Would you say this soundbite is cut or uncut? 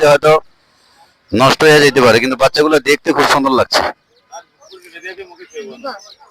uncut